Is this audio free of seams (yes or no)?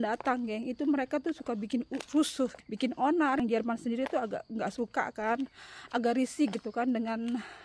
no